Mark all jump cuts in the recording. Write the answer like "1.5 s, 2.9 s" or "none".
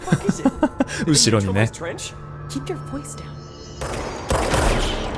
3.9 s